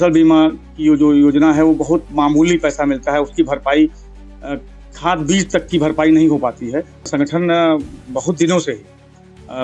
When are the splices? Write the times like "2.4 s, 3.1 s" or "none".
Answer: 7.1 s